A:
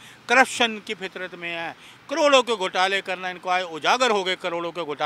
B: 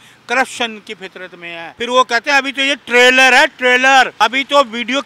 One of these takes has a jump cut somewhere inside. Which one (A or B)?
B